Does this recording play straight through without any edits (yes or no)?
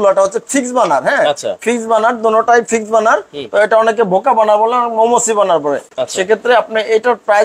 yes